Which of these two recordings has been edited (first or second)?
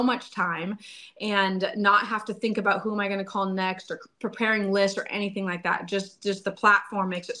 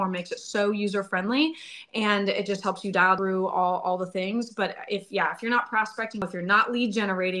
second